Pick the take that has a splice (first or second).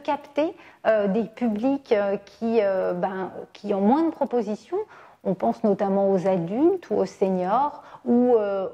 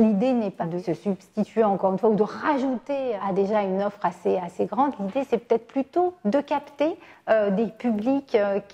second